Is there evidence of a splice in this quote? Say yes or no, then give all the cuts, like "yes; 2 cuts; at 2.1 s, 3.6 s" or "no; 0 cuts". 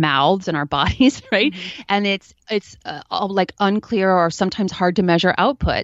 no; 0 cuts